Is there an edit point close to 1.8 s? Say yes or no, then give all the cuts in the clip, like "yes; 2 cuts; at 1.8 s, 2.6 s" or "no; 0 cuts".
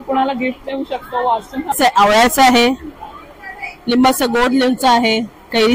yes; 1 cut; at 1.8 s